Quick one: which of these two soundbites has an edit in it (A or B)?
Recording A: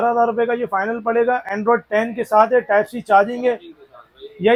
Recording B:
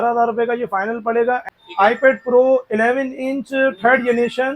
B